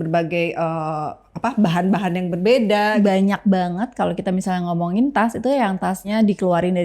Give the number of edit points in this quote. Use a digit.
1